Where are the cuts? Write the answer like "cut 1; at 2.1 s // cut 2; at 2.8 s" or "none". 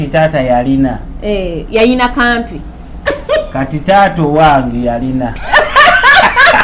cut 1; at 5.4 s